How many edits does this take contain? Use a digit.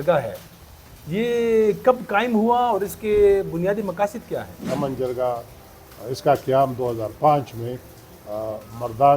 1